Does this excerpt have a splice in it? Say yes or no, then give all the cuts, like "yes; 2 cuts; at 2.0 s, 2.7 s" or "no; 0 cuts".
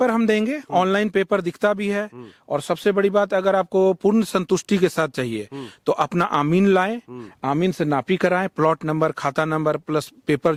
no; 0 cuts